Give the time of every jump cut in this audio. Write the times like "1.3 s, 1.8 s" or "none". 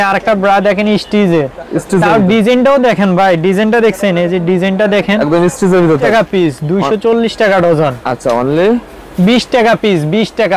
6.1 s

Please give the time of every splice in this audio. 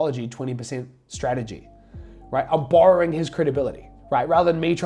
none

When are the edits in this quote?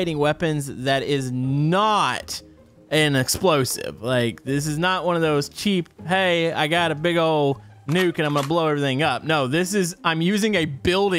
none

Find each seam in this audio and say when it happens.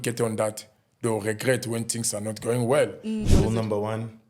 3.3 s

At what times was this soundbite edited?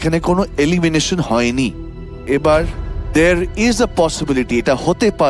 2.2 s

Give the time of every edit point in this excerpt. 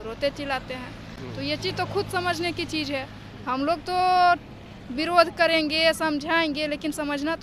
none

